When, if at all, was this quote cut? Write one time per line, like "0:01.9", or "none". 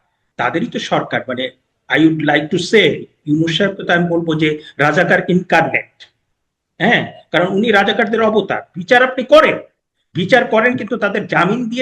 0:08.7